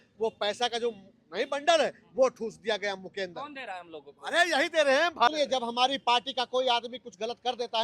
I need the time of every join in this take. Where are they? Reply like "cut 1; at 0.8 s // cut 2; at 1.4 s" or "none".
cut 1; at 5.3 s